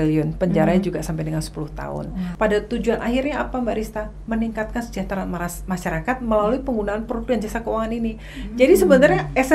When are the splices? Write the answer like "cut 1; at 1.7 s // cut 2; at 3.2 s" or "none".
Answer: cut 1; at 2.3 s